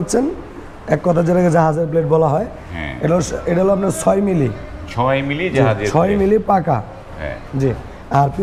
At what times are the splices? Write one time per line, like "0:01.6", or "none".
none